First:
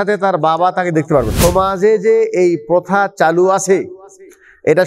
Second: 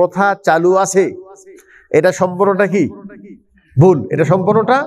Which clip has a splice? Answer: first; 1 cut; at 1.3 s

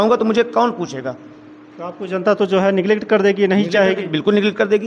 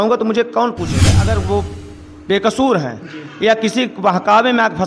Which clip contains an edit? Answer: second; 1 cut; at 1.3 s

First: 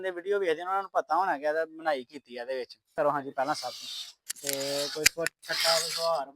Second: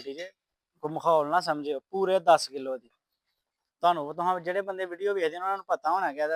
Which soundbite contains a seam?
first; 1 cut; at 2.9 s

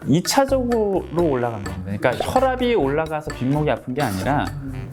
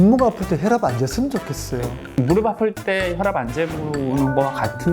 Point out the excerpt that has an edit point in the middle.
second; 1 cut; at 2.0 s

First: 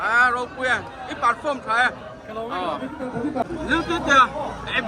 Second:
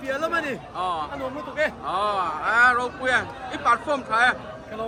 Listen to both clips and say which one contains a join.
first; 1 cut; at 3.4 s

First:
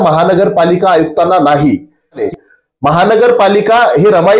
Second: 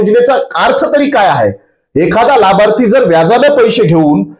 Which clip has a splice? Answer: first; 1 cut; at 2.2 s

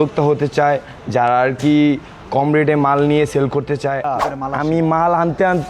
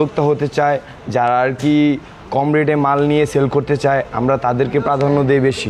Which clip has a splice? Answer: first; 1 cut; at 4.1 s

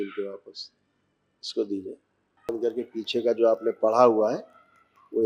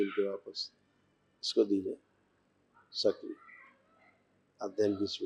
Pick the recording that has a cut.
first; 1 cut; at 2.5 s

